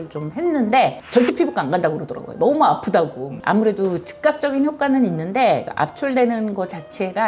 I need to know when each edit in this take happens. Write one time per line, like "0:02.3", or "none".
none